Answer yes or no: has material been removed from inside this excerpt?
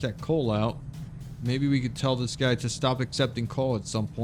no